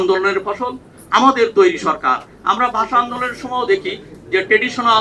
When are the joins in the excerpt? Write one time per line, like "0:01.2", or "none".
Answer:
0:02.3